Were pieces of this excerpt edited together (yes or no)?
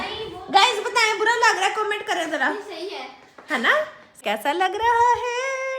yes